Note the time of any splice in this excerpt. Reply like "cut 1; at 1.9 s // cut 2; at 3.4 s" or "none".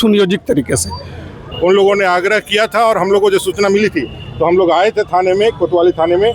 cut 1; at 1.5 s